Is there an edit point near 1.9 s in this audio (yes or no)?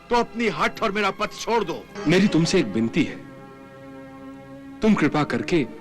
yes